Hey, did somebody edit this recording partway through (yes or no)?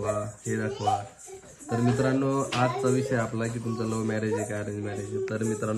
no